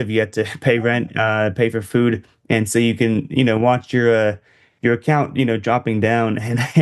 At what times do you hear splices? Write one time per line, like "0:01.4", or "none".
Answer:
none

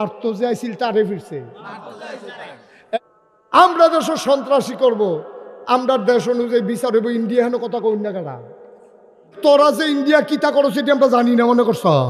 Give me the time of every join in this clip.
0:03.0
0:09.3

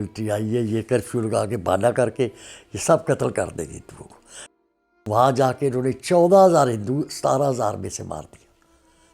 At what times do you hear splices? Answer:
0:04.4

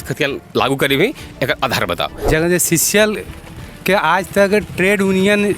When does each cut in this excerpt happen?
0:02.1

